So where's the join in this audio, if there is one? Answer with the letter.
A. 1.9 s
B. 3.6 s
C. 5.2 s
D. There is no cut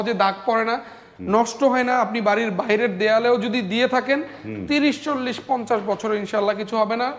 D